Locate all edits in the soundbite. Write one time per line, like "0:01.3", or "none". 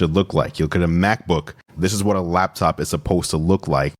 0:01.6